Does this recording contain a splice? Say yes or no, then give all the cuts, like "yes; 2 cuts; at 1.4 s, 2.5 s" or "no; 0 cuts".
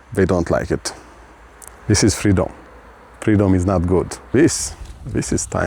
yes; 1 cut; at 4.3 s